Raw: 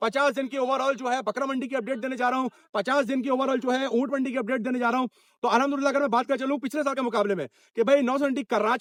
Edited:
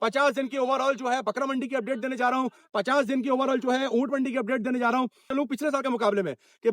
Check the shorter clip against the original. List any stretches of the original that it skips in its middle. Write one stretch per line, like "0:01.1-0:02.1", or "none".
0:05.3-0:06.4